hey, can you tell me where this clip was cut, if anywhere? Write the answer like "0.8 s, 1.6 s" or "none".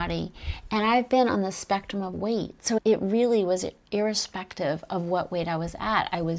2.8 s